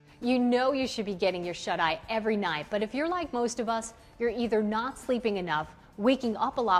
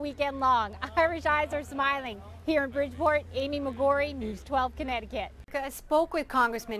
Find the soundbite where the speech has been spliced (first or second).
second